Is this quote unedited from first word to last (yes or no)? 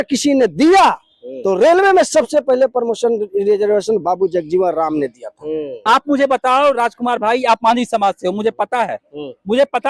no